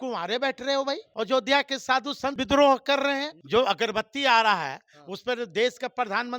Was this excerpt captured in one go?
no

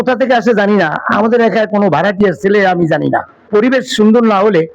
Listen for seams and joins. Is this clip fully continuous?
no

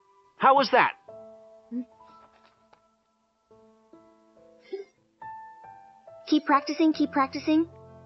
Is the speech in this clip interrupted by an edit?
no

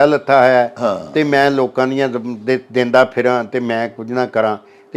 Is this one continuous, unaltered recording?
yes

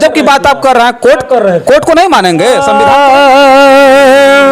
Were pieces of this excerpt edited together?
yes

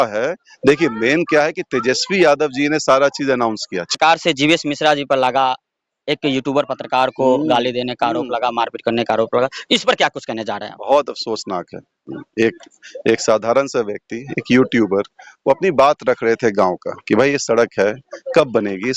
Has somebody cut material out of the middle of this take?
yes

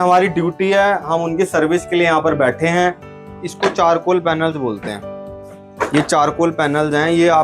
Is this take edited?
yes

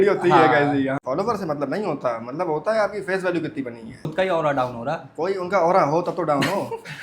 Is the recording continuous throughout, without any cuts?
no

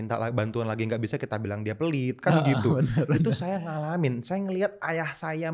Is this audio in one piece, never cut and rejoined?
yes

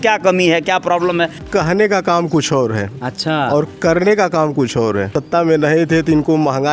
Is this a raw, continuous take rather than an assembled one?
no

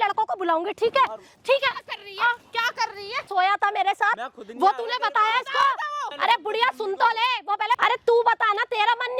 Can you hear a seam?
yes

